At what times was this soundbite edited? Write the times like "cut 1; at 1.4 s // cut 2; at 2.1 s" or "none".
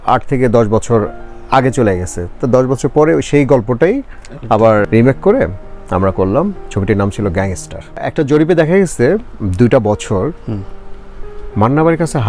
cut 1; at 8.0 s